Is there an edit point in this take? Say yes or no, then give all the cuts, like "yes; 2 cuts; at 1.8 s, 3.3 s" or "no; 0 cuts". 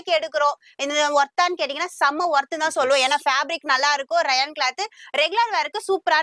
no; 0 cuts